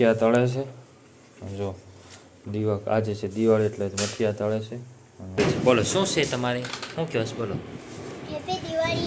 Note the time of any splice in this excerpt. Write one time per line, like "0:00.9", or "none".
0:05.4